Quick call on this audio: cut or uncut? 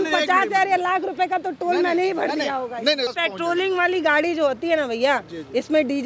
cut